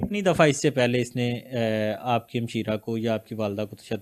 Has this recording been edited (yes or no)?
no